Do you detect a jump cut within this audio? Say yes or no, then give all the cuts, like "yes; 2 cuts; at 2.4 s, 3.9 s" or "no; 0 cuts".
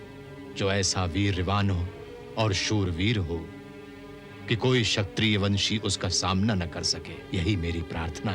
yes; 1 cut; at 7.2 s